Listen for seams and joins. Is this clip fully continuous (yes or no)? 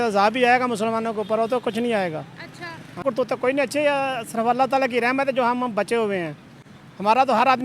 no